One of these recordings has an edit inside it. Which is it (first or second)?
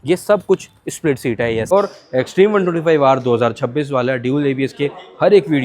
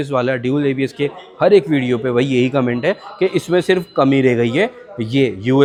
first